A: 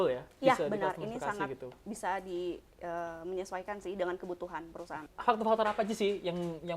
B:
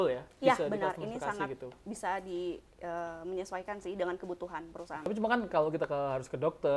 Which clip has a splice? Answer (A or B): B